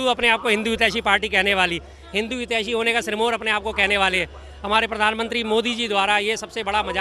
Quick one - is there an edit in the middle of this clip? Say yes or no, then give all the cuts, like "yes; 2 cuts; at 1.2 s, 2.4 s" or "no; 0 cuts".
no; 0 cuts